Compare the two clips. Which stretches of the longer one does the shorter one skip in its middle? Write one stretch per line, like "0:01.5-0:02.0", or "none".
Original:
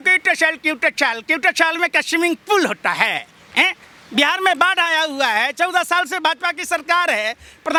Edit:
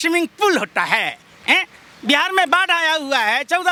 none